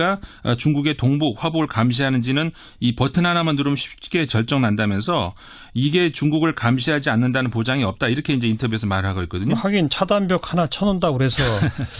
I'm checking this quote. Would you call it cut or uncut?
cut